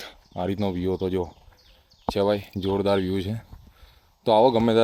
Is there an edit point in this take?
no; 0 cuts

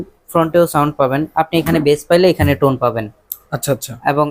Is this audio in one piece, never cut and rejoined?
yes; 0 cuts

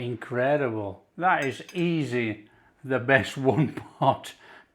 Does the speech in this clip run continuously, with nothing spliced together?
no; 1 cut; at 1.0 s

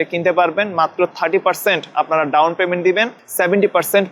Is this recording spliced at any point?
yes; 1 cut; at 3.1 s

